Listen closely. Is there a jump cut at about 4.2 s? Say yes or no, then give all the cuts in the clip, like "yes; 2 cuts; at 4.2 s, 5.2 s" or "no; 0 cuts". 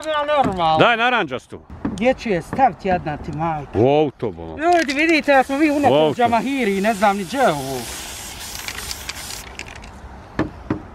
no; 1 cut; at 1.5 s